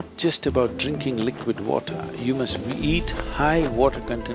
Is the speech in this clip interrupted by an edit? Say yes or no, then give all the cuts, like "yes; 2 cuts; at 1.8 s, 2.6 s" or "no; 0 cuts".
no; 0 cuts